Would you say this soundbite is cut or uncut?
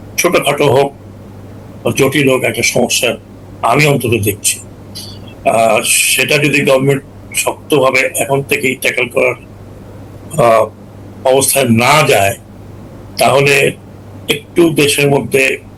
uncut